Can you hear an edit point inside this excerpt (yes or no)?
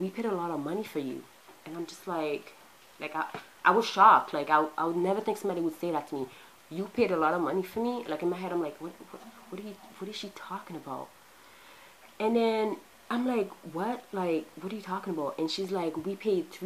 no